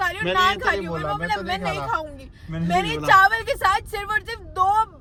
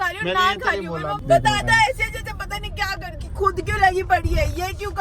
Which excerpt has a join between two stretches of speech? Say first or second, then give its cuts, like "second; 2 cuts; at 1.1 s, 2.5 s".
second; 2 cuts; at 1.1 s, 3.0 s